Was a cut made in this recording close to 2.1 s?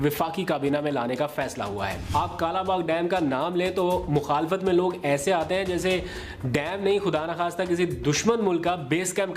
yes; 1 cut; at 2.1 s

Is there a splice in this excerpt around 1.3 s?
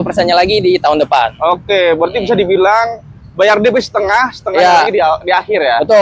no; 0 cuts

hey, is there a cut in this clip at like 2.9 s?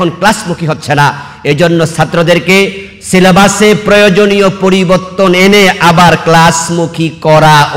no; 0 cuts

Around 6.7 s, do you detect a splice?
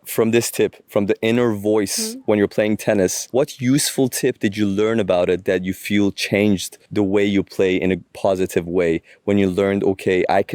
no; 0 cuts

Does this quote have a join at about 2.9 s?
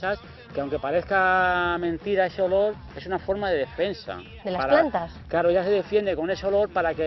no; 0 cuts

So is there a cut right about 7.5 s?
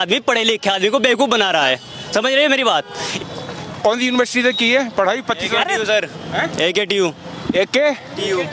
no; 1 cut; at 3.0 s

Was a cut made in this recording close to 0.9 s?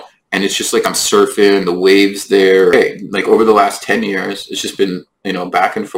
no; 1 cut; at 2.7 s

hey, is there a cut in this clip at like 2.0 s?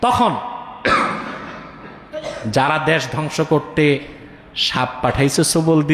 no; 0 cuts

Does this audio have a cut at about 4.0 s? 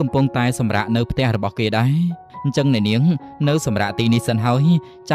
no; 1 cut; at 2.4 s

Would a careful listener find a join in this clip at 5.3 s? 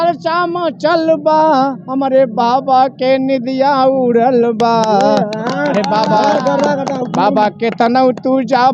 no; 0 cuts

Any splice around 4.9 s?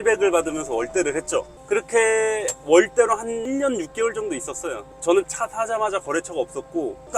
yes; 3 cuts; at 2.5 s, 3.4 s, 4.9 s

